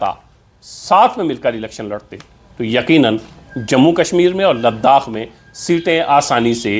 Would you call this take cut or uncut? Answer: uncut